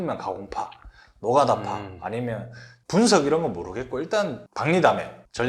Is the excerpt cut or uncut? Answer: cut